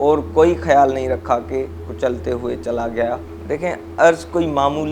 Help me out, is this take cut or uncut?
cut